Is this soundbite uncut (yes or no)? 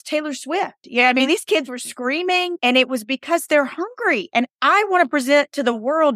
no